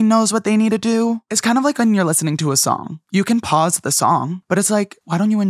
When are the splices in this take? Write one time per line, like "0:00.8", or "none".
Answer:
0:01.3
0:02.9
0:04.6